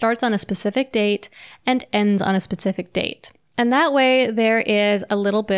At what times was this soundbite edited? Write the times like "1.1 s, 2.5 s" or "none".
none